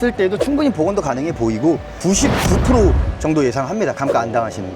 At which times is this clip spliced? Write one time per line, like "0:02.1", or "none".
0:01.9